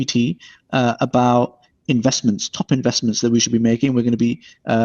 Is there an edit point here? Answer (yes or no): no